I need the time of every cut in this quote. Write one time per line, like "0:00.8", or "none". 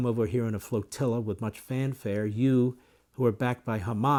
none